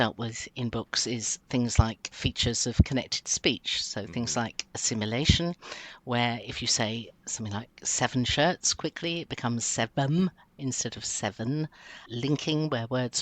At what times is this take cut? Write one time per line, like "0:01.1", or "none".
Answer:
0:02.0
0:12.0